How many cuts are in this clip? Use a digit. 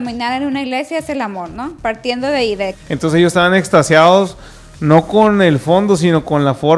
1